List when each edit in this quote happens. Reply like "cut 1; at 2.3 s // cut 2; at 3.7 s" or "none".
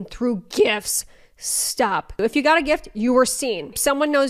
none